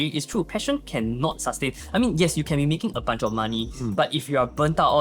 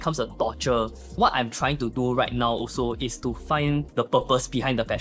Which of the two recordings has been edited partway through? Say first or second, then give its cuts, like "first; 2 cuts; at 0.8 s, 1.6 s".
second; 2 cuts; at 1.1 s, 3.9 s